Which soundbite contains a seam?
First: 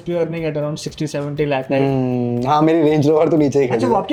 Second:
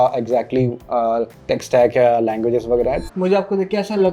second; 1 cut; at 3.1 s

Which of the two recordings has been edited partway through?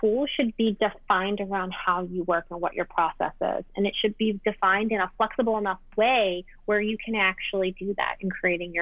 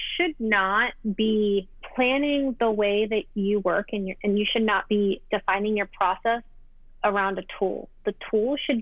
second; 2 cuts; at 0.9 s, 1.8 s

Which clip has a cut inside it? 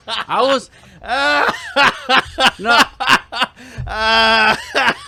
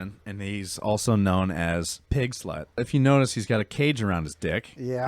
second; 1 cut; at 2.8 s

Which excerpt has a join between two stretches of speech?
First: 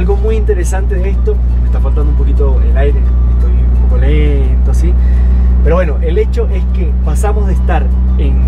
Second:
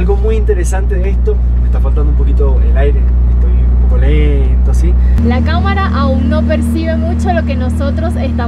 second; 1 cut; at 5.2 s

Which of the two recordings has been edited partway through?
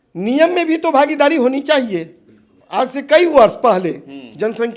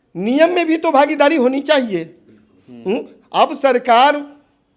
first; 1 cut; at 2.5 s

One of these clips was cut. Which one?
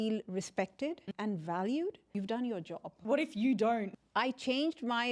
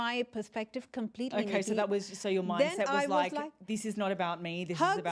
first; 4 cuts; at 1.0 s, 2.1 s, 3.0 s, 4.0 s

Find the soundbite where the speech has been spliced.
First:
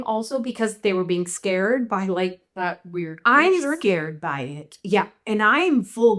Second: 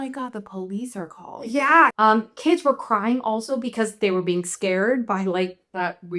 second; 1 cut; at 1.9 s

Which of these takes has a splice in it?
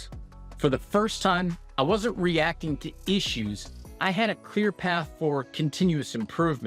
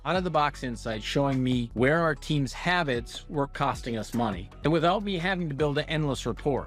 second; 2 cuts; at 1.7 s, 4.5 s

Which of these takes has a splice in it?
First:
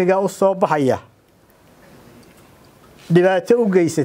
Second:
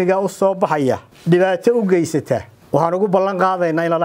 second; 2 cuts; at 1.1 s, 2.5 s

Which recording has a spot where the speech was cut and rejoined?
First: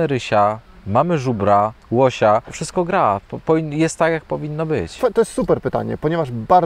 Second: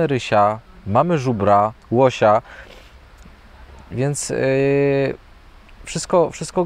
first; 2 cuts; at 2.6 s, 4.9 s

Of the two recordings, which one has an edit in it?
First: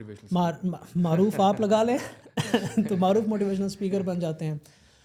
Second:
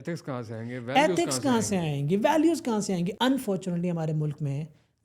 second; 1 cut; at 3.1 s

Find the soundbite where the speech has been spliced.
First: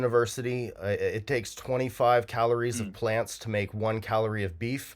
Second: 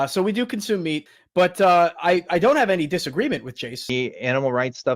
second; 2 cuts; at 1.1 s, 3.8 s

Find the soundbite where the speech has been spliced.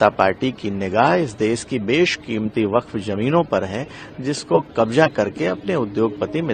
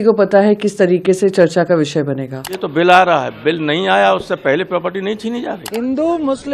second; 2 cuts; at 2.6 s, 5.6 s

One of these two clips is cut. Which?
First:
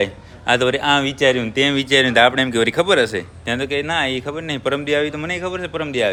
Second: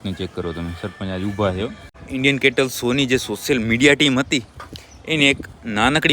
second; 1 cut; at 2.0 s

